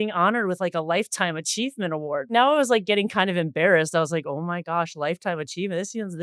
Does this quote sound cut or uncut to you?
cut